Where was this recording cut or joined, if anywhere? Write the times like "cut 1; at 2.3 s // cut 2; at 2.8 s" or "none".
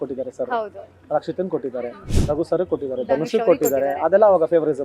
none